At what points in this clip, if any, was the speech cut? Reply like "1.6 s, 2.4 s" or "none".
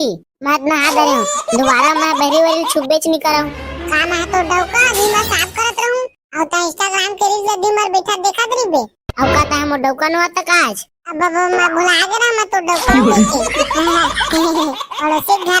none